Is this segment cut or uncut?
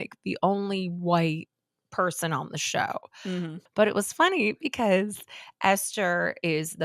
cut